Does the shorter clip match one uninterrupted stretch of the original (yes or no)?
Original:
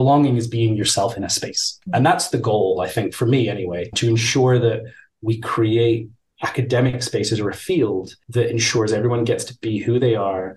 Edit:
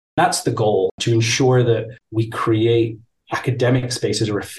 no